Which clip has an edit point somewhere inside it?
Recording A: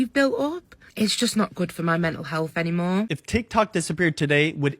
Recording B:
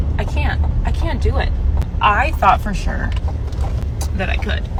A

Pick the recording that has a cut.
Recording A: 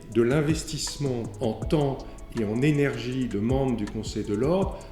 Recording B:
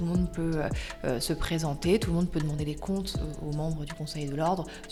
A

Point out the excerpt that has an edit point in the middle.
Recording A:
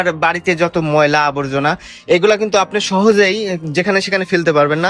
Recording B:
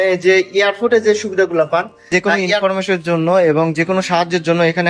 B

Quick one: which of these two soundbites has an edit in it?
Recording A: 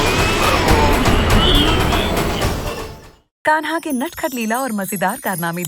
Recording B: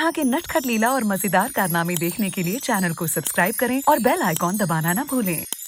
A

